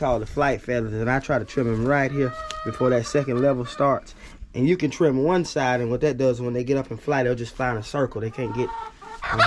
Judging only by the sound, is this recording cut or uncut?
uncut